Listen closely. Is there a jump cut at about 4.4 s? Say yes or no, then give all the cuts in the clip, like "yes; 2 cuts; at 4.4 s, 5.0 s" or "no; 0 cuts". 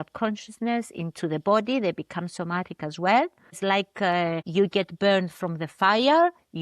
yes; 2 cuts; at 3.6 s, 4.4 s